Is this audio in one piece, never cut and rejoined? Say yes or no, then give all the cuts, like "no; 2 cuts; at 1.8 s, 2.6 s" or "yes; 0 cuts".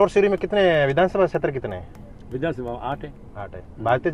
yes; 0 cuts